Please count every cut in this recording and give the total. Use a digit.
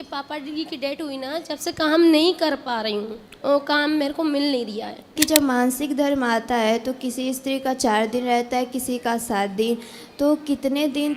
1